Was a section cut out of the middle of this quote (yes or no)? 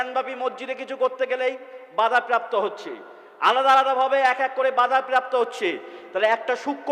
no